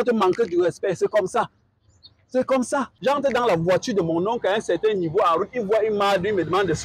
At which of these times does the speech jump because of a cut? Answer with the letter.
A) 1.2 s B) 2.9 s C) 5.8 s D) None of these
B